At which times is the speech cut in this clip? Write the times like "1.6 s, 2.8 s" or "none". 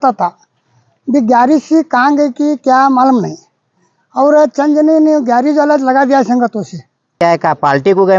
7.2 s